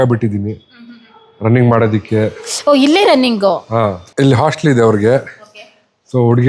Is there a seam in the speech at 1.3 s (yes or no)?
no